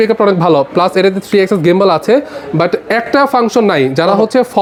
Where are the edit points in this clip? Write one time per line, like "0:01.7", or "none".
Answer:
none